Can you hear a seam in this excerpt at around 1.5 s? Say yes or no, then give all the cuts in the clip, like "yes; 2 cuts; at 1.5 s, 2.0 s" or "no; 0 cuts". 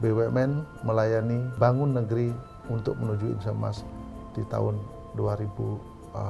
yes; 1 cut; at 1.5 s